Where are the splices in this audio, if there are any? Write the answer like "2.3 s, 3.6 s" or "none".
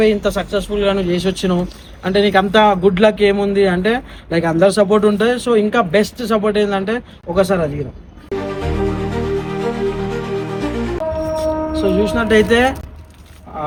none